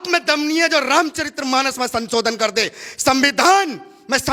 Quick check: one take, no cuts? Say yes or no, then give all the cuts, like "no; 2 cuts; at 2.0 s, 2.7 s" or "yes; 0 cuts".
yes; 0 cuts